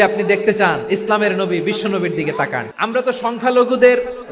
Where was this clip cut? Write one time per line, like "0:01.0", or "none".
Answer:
0:02.7